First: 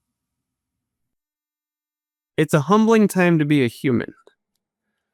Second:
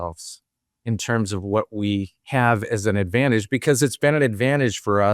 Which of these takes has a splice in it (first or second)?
second